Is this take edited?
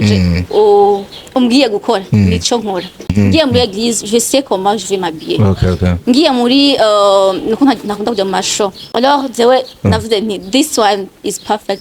yes; 2 cuts; at 3.1 s, 8.8 s

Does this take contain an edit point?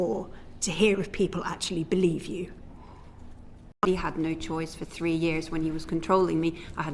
yes; 1 cut; at 3.8 s

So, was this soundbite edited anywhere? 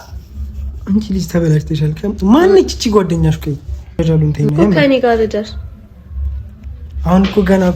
yes; 1 cut; at 4.0 s

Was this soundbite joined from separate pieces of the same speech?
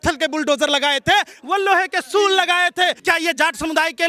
yes; 1 cut; at 3.0 s

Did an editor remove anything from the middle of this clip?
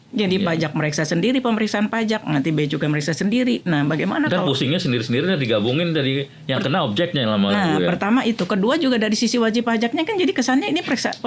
no; 0 cuts

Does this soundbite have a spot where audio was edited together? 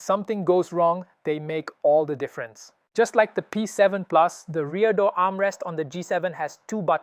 no; 0 cuts

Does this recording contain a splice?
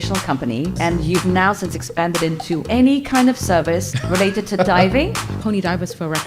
yes; 4 cuts; at 0.8 s, 2.6 s, 4.0 s, 5.3 s

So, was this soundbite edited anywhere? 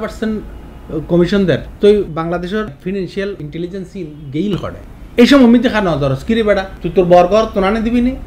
yes; 2 cuts; at 1.7 s, 6.8 s

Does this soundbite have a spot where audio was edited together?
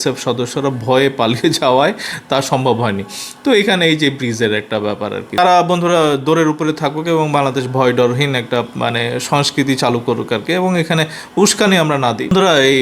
no; 0 cuts

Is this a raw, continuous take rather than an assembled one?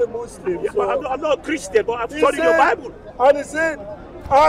yes; 0 cuts

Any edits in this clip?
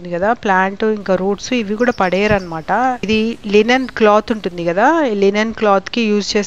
yes; 1 cut; at 3.0 s

